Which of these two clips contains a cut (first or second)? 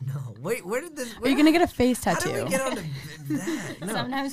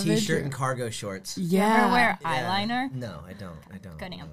second